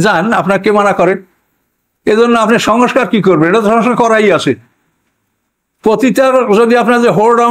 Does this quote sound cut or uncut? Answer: uncut